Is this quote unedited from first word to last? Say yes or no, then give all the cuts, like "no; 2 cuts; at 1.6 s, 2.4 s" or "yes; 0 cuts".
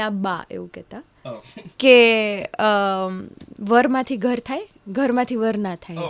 yes; 0 cuts